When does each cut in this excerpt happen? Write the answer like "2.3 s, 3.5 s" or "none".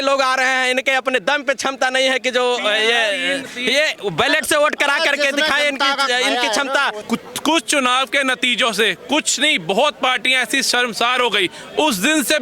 7.0 s

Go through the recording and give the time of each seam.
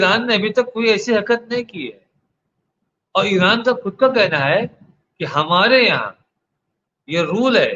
none

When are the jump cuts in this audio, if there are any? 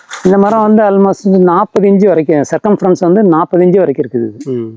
none

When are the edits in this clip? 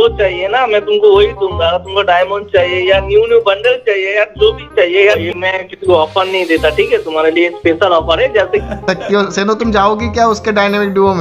5.3 s, 8.6 s

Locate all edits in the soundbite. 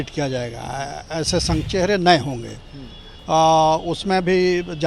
1.6 s

